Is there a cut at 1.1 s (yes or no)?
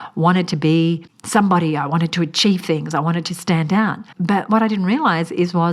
yes